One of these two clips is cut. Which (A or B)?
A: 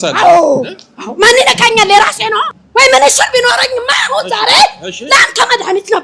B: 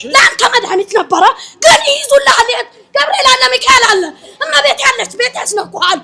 A